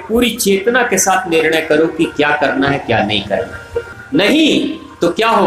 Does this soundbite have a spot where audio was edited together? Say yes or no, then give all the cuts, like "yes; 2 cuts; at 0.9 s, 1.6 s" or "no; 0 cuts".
yes; 1 cut; at 3.9 s